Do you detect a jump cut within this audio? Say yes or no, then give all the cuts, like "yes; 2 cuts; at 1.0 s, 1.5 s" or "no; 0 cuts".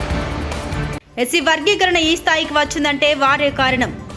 yes; 1 cut; at 1.0 s